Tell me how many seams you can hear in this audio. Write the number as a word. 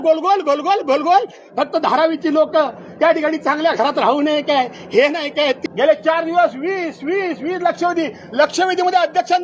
one